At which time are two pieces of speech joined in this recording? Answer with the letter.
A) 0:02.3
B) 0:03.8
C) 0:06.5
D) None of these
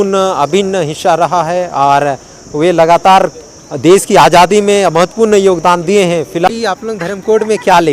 C